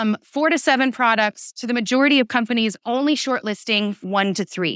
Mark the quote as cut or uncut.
uncut